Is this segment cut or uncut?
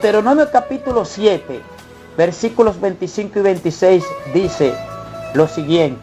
uncut